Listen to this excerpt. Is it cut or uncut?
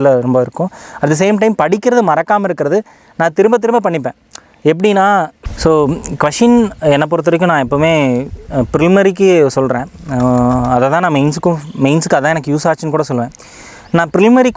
cut